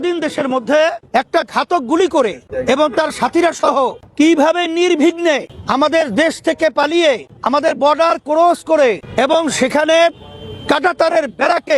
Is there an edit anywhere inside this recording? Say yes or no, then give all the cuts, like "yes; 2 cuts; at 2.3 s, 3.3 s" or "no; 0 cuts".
yes; 6 cuts; at 1.0 s, 2.5 s, 4.0 s, 5.6 s, 7.3 s, 9.0 s